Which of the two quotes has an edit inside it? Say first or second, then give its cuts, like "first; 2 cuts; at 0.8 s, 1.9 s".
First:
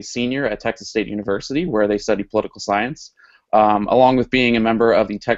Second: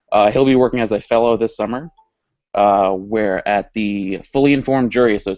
second; 1 cut; at 3.2 s